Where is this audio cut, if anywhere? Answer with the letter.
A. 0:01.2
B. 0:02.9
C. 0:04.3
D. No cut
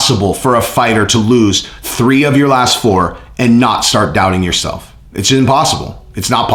D